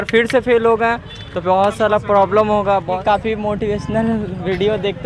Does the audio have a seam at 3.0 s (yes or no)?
yes